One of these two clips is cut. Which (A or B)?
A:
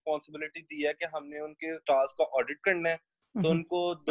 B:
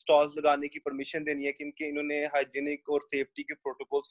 A